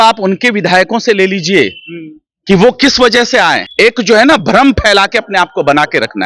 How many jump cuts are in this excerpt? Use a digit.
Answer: 1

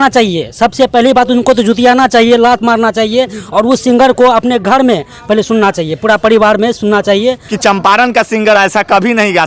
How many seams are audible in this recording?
1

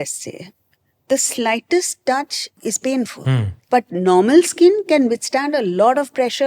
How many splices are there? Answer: 2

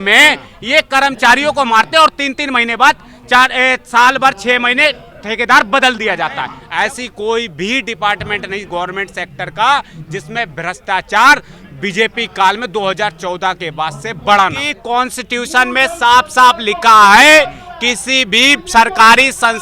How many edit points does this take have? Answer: 2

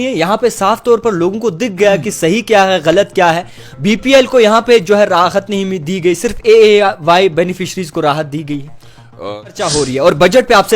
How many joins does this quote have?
1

